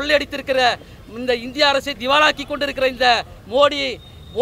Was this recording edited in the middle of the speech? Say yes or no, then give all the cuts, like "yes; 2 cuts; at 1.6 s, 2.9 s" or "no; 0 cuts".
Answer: no; 0 cuts